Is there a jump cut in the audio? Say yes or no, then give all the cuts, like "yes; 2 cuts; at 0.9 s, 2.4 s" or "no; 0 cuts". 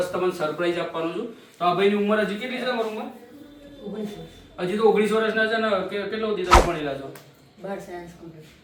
no; 0 cuts